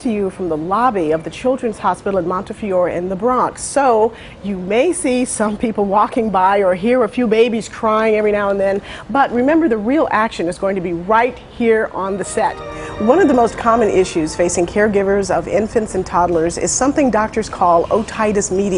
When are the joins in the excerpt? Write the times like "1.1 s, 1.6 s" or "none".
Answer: none